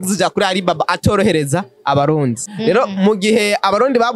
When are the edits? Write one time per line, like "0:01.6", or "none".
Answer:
0:02.4